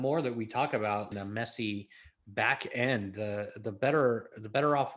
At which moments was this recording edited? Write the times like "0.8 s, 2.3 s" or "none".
1.1 s